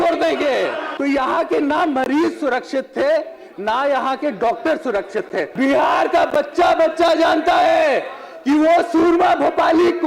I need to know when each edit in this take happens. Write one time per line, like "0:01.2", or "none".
0:00.9
0:05.5